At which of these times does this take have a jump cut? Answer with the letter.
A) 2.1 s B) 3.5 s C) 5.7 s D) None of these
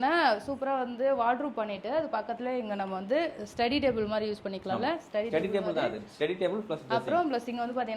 D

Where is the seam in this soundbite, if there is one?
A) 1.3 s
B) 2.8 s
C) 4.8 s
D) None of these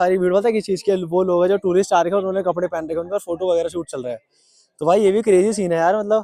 D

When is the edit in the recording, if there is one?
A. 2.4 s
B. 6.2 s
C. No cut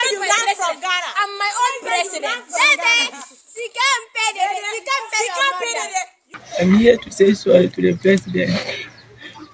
B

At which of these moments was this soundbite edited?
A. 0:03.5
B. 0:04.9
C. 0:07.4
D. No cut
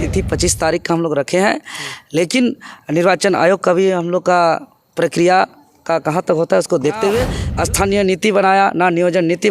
C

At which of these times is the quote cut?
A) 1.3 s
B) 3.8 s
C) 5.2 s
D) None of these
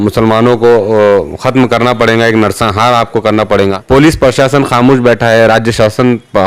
B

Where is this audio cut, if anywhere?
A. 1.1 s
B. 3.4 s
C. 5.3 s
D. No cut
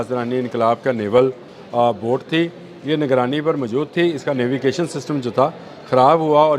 D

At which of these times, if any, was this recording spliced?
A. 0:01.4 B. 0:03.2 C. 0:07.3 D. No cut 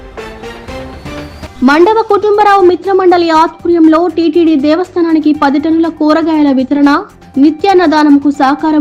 D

